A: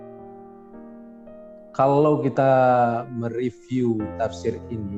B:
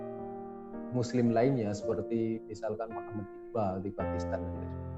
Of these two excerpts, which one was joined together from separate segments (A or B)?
B